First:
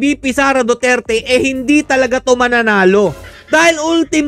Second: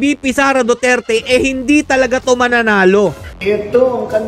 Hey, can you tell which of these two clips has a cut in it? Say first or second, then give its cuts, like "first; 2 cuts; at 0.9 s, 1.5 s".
second; 1 cut; at 3.4 s